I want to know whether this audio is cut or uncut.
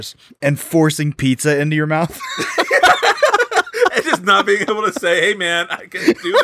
uncut